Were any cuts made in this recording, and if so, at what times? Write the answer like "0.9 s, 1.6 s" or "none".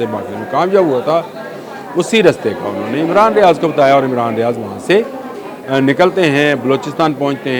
none